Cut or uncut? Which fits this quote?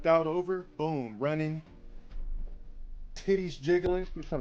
uncut